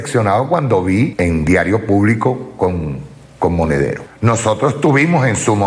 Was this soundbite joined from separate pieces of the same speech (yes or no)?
yes